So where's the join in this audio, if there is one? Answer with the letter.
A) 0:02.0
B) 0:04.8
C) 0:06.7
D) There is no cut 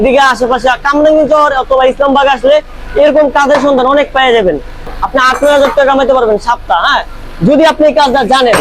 B